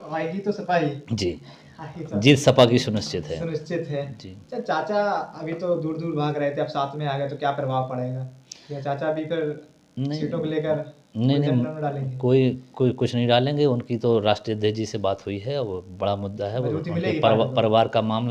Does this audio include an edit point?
no; 0 cuts

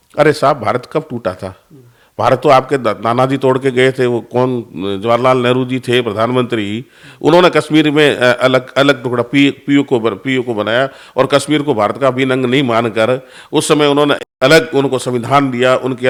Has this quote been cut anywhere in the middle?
no; 0 cuts

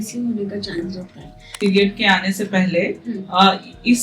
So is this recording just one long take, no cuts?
no; 1 cut; at 1.6 s

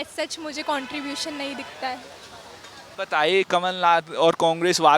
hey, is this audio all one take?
no; 1 cut; at 2.8 s

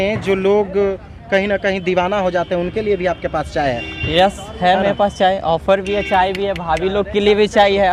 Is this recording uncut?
yes; 0 cuts

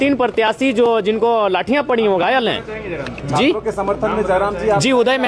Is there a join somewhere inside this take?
no; 0 cuts

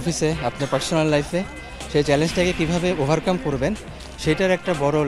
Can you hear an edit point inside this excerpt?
no; 0 cuts

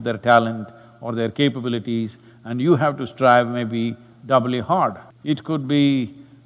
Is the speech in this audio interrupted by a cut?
yes; 1 cut; at 5.1 s

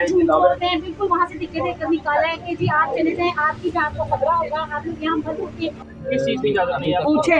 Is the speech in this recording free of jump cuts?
no; 1 cut; at 5.9 s

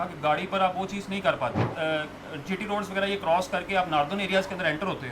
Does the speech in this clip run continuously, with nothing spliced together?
no; 1 cut; at 1.7 s

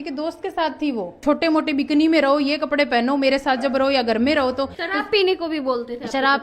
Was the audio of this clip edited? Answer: yes; 2 cuts; at 1.1 s, 4.8 s

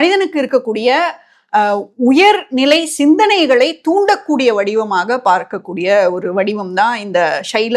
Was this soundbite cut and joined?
no; 0 cuts

